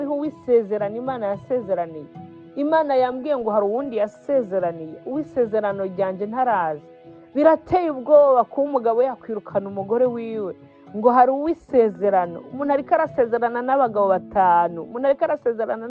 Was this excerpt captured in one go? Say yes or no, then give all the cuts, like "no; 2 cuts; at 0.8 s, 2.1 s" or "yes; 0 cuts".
yes; 0 cuts